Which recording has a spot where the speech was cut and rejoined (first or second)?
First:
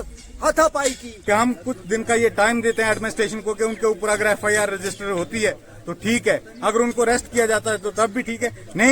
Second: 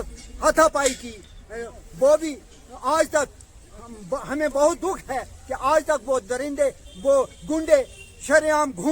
first